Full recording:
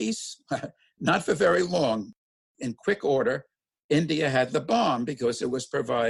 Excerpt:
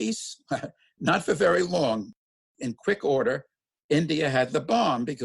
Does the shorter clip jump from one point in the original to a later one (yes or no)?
no